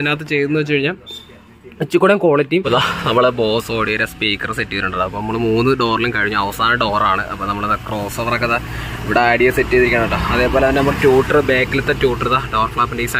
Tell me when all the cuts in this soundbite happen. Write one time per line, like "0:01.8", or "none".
0:02.6